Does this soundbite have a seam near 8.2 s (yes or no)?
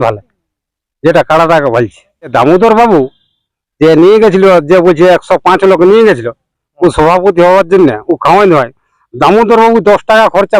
no